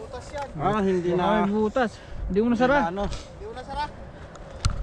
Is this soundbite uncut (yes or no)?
yes